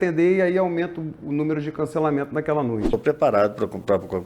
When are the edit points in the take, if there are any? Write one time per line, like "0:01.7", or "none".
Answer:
0:02.9